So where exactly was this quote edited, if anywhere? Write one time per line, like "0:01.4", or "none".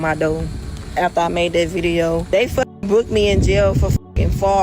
0:02.2